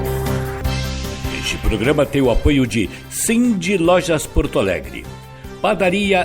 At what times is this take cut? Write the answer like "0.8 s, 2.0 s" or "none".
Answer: 1.1 s